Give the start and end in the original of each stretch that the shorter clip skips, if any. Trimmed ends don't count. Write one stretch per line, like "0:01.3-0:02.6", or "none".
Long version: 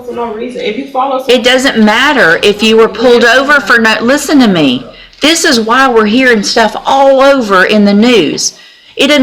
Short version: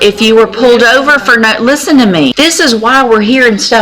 0:04.7-0:05.2